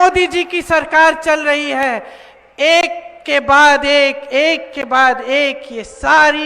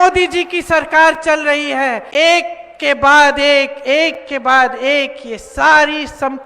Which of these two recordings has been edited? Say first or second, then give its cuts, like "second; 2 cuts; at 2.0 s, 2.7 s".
second; 1 cut; at 2.0 s